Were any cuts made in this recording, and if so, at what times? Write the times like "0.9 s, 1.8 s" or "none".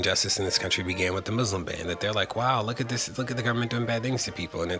none